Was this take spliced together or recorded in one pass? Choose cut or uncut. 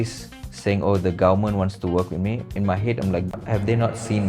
cut